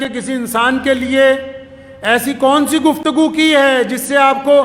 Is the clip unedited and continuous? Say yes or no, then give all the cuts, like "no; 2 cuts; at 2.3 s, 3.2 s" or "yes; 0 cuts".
yes; 0 cuts